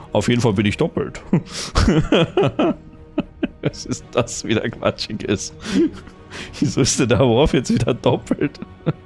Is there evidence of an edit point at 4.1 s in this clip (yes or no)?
no